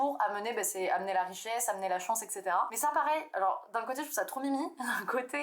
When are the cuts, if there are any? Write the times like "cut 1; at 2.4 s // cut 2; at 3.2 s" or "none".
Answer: cut 1; at 2.7 s